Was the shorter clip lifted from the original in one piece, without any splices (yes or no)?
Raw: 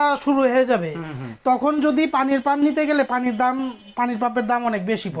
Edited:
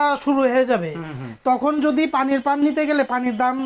yes